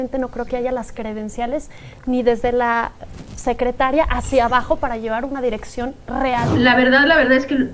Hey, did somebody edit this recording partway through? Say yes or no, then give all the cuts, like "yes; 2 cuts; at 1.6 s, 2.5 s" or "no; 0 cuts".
yes; 1 cut; at 6.5 s